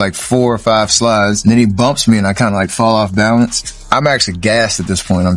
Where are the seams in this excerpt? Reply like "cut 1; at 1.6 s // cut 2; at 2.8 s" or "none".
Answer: cut 1; at 1.4 s // cut 2; at 3.9 s

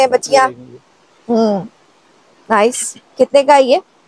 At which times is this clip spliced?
none

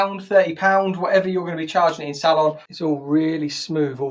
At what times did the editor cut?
cut 1; at 2.7 s

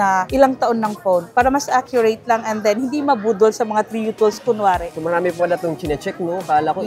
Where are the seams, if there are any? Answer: none

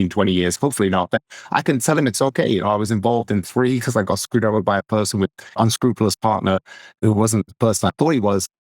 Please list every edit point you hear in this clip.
cut 1; at 5.5 s // cut 2; at 6.9 s

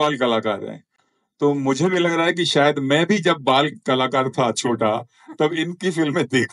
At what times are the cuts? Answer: none

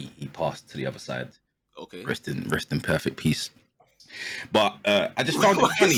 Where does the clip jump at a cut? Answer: none

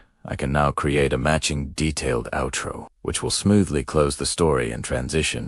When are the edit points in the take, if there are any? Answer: cut 1; at 1.5 s

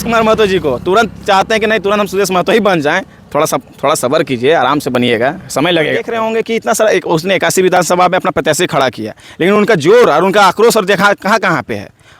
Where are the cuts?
cut 1; at 6.1 s

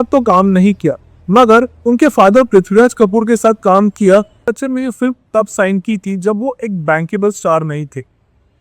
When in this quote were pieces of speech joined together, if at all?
cut 1; at 4.5 s

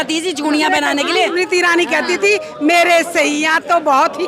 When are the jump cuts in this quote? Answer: cut 1; at 1.3 s

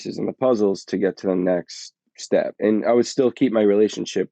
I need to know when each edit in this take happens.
cut 1; at 2.5 s

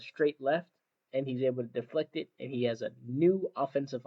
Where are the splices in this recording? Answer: cut 1; at 1.0 s

